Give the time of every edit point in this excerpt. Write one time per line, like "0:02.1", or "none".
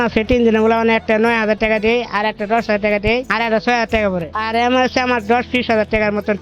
0:03.3
0:04.3

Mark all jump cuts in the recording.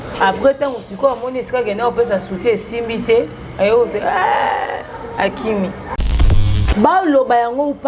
0:06.3

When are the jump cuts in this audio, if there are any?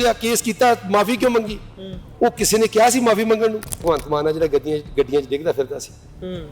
0:03.8

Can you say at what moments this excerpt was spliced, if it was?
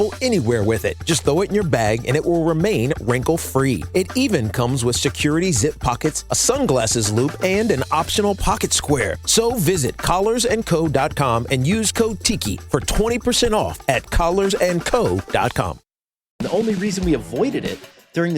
0:16.4

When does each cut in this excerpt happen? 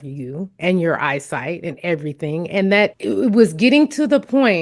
0:02.9

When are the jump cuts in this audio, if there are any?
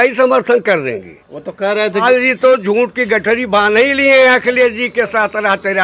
0:02.0

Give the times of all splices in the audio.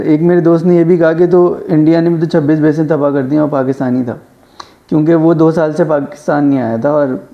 none

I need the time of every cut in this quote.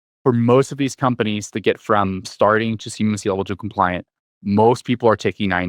none

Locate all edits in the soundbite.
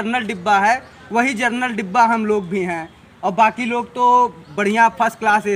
none

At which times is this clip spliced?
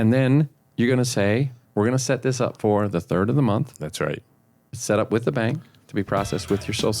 0:01.6

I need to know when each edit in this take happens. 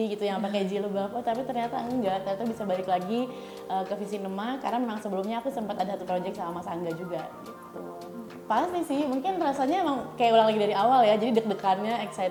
none

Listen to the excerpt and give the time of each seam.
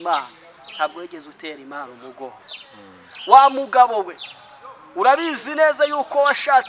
none

